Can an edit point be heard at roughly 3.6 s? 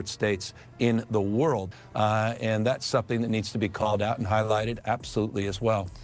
no; 1 cut; at 1.7 s

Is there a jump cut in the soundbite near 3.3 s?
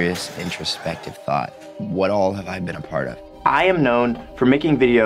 yes; 2 cuts; at 1.6 s, 3.3 s

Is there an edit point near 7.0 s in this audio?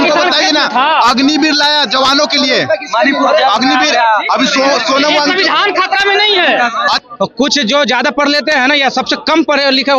yes; 1 cut; at 7.0 s

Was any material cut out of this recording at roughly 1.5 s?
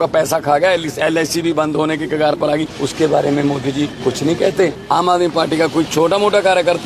no; 3 cuts; at 2.8 s, 3.9 s, 4.8 s

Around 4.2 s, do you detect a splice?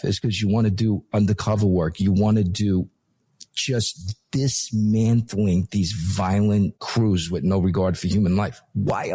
no; 1 cut; at 6.8 s

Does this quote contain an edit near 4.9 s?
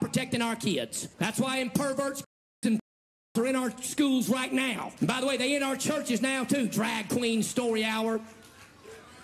yes; 2 cuts; at 1.0 s, 4.9 s

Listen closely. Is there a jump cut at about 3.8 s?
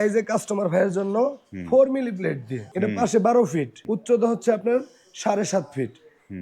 yes; 2 cuts; at 2.6 s, 3.8 s

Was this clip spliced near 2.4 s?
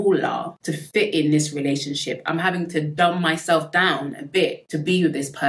no; 0 cuts

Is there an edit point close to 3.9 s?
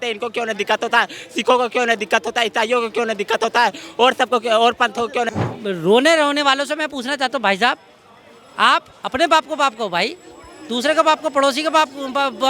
no; 1 cut; at 5.3 s

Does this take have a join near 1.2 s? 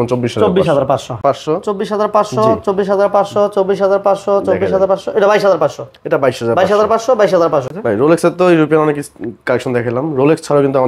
yes; 2 cuts; at 1.2 s, 7.7 s

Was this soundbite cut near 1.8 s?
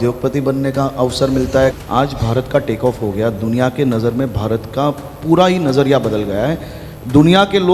yes; 1 cut; at 1.8 s

